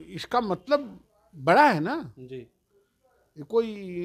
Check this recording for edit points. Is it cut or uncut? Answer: uncut